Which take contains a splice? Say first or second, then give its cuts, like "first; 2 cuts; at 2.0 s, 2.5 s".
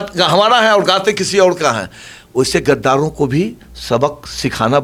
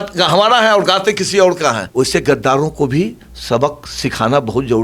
second; 1 cut; at 1.8 s